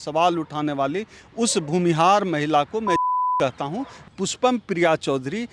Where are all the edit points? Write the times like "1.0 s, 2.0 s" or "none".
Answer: 4.0 s